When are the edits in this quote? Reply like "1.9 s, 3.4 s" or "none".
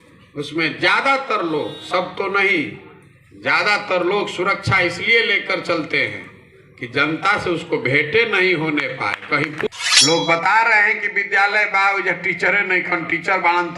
9.7 s